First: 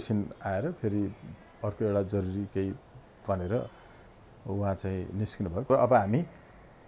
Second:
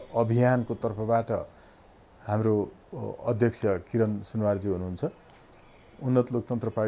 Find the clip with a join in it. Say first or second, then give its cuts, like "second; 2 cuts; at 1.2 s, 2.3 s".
first; 1 cut; at 5.7 s